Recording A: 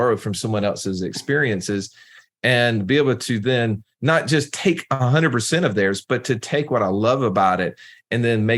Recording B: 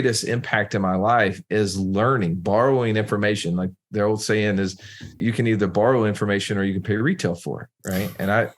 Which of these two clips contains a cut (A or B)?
B